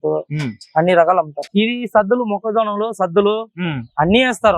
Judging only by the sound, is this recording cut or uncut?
cut